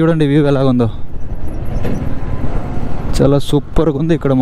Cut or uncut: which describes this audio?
uncut